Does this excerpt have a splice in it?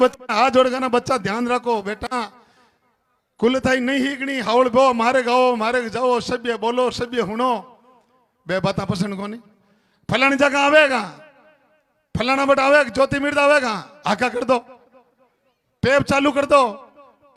no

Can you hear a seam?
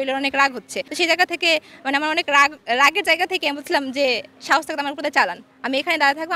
no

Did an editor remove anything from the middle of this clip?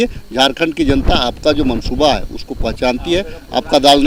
no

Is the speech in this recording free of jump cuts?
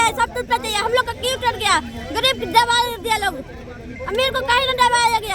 yes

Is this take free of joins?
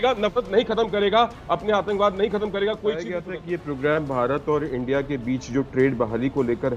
no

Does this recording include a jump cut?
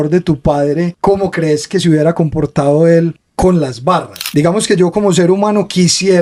yes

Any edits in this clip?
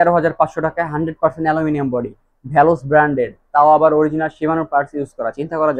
no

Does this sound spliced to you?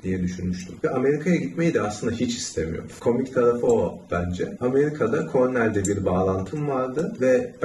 no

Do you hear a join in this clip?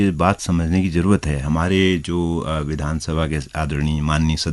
no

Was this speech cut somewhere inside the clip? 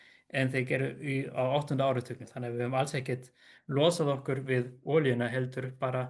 yes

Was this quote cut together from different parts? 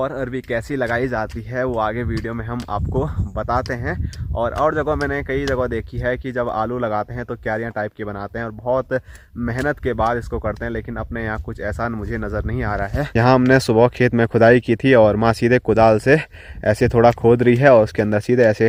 no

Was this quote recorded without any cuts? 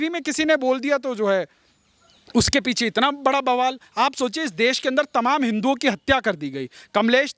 yes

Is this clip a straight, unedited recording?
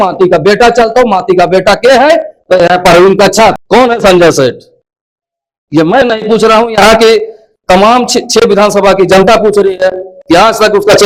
no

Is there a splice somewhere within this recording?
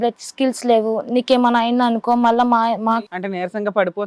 yes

